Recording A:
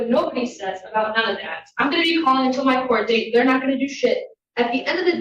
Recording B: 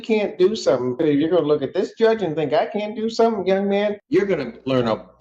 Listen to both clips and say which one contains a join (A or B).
B